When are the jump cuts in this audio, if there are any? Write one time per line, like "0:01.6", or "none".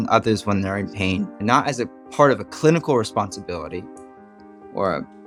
none